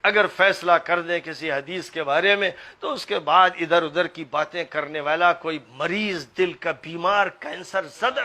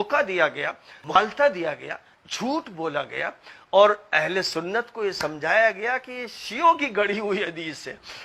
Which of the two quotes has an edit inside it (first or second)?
second